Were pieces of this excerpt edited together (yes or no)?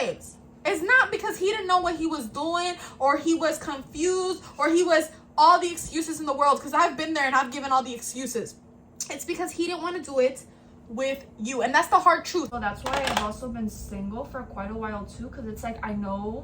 yes